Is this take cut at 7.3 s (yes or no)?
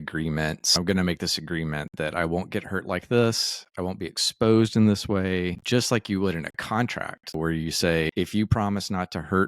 yes